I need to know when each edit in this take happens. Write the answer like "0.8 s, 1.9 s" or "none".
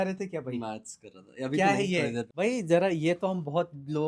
2.3 s